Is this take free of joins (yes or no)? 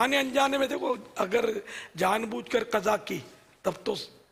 yes